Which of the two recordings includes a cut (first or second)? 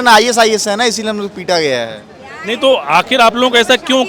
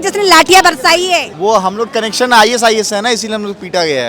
second